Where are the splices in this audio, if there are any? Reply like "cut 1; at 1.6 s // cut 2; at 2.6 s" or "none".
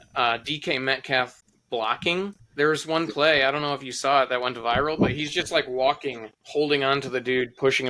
cut 1; at 2.4 s